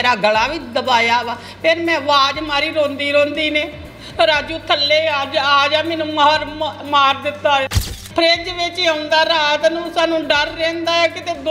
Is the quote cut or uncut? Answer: cut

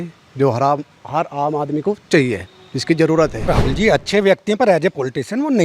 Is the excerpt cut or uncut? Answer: cut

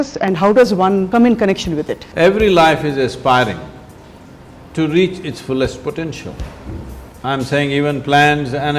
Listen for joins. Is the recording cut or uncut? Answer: cut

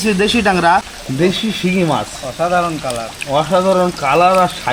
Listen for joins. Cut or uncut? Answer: cut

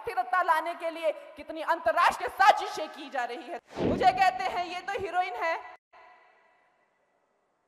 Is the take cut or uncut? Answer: cut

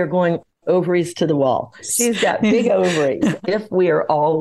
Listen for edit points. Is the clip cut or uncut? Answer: cut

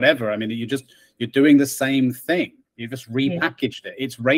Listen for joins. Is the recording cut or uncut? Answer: uncut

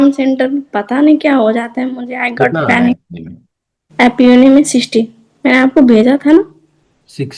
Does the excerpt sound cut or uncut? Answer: uncut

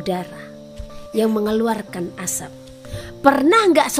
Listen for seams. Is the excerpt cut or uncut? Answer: cut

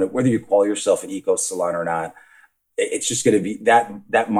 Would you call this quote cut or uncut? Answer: cut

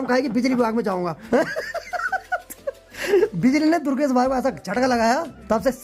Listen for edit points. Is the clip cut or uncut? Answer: uncut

